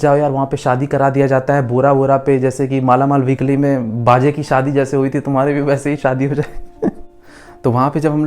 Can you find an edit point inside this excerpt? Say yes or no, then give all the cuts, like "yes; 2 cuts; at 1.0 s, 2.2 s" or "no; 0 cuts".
yes; 1 cut; at 7.1 s